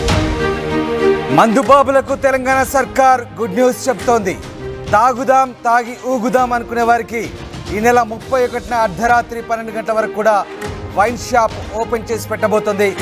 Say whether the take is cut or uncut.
cut